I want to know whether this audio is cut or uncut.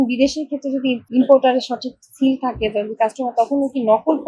uncut